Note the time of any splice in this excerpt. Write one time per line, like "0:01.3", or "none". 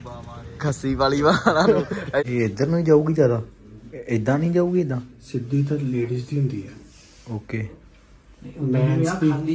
0:02.2